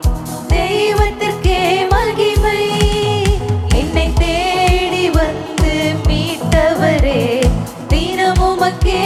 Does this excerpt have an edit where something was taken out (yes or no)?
no